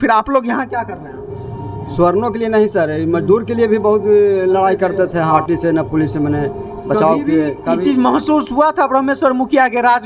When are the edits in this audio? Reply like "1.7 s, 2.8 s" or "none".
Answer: 5.4 s